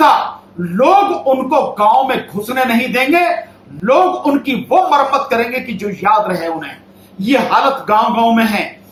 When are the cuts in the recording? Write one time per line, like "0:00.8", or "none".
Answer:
none